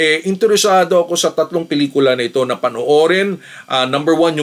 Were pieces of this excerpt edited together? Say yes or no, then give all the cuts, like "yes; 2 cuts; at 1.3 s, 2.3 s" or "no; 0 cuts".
no; 0 cuts